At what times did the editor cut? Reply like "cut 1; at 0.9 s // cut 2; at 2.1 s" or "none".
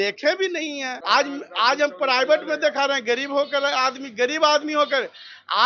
cut 1; at 1.0 s